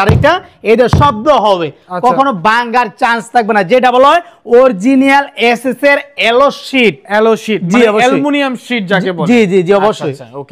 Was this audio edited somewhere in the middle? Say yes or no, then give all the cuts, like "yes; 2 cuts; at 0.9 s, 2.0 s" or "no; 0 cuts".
no; 0 cuts